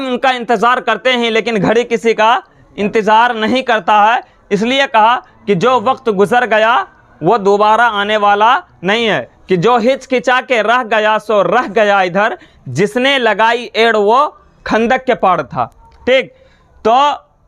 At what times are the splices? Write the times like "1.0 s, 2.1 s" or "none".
none